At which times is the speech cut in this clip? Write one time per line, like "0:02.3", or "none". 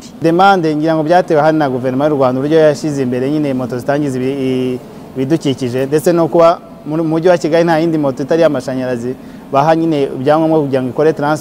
none